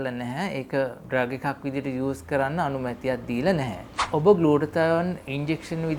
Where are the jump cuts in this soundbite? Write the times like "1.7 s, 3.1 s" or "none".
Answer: 1.0 s